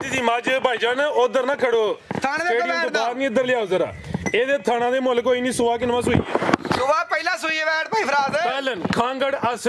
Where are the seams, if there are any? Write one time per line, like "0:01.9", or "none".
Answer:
none